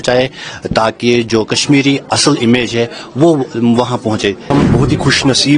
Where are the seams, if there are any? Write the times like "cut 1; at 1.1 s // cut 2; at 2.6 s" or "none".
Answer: cut 1; at 4.5 s